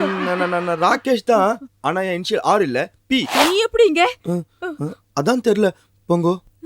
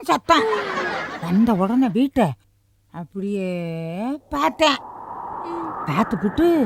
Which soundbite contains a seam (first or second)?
first